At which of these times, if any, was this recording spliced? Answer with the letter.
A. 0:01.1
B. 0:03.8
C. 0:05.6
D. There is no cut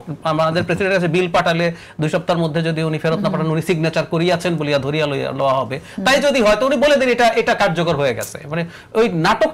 D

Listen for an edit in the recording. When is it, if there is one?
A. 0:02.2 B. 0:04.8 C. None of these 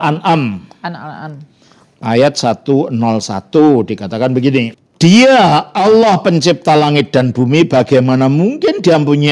B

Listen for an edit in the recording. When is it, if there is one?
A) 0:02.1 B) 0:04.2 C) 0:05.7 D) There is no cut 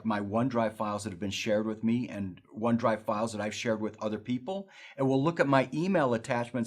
C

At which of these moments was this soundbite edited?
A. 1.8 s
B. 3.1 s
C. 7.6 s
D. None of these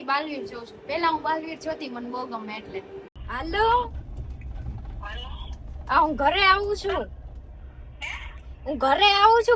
B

